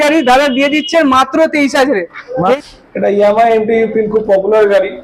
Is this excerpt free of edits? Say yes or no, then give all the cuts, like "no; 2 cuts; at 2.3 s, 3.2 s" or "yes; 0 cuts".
no; 1 cut; at 2.6 s